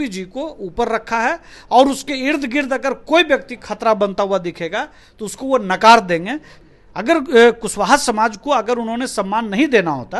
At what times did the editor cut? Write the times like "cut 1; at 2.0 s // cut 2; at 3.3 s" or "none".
none